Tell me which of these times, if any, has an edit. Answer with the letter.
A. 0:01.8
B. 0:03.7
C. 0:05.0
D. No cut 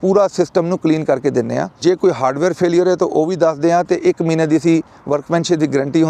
A